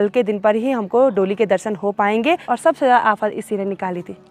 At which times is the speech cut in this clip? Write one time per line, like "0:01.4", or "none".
0:02.4